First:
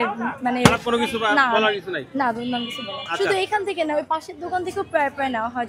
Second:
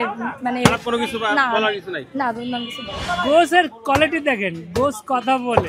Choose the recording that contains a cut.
second; 1 cut; at 3.0 s

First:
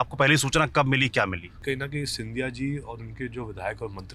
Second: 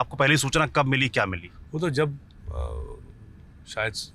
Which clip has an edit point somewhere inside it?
first; 1 cut; at 1.6 s

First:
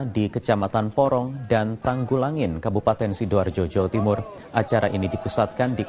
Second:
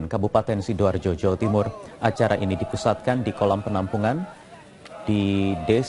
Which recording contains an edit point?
second; 1 cut; at 4.3 s

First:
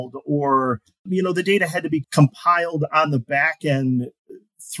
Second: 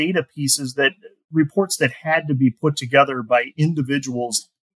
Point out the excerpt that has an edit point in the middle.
first; 2 cuts; at 1.0 s, 2.0 s

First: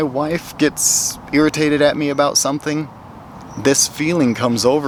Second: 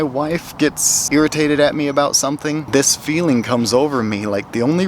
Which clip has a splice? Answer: second; 2 cuts; at 0.9 s, 2.6 s

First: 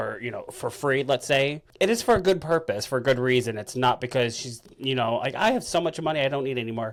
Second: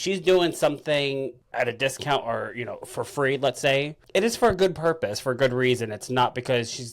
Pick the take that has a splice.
second; 1 cut; at 1.4 s

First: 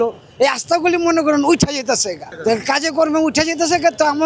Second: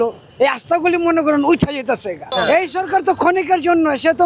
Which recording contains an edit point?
second; 1 cut; at 2.3 s

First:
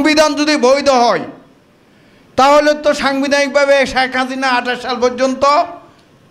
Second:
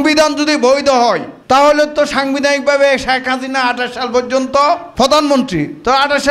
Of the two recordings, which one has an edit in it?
second; 2 cuts; at 1.3 s, 4.9 s

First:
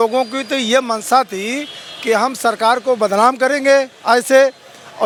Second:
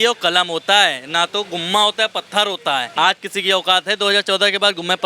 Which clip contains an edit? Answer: second; 1 cut; at 2.9 s

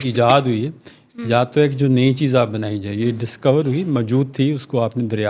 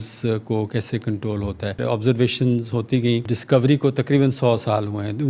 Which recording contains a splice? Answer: second; 2 cuts; at 1.8 s, 3.3 s

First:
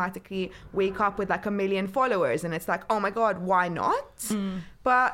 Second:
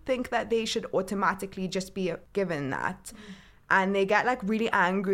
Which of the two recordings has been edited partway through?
second; 1 cut; at 2.2 s

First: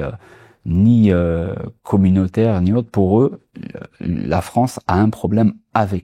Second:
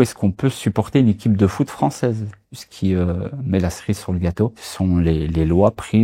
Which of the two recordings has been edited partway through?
second; 2 cuts; at 2.7 s, 4.6 s

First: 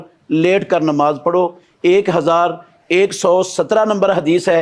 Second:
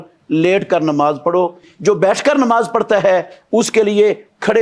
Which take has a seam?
second; 1 cut; at 1.7 s

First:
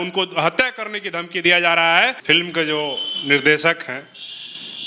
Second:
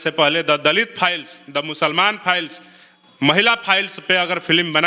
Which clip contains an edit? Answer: first; 1 cut; at 2.2 s

